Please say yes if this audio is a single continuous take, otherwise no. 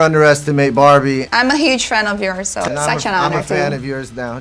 no